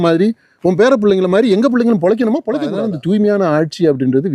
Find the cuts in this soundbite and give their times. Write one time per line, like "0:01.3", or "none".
0:02.7